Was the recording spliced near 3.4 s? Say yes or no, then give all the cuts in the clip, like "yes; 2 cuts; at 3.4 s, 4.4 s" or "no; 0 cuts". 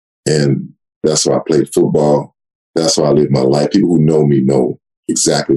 no; 1 cut; at 1.0 s